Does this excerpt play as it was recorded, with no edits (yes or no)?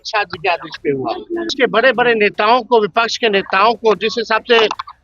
no